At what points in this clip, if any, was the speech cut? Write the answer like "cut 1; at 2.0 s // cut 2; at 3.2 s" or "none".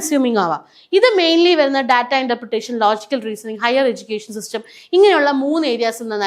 none